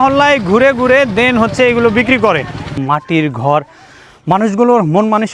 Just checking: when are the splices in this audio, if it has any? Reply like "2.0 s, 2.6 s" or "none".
2.8 s